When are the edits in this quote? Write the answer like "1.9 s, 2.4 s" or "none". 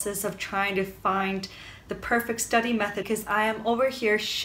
3.1 s